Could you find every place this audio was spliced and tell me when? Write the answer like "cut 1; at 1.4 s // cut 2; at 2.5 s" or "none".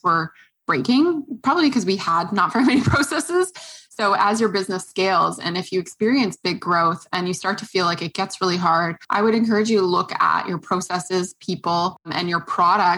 cut 1; at 9.0 s // cut 2; at 12.1 s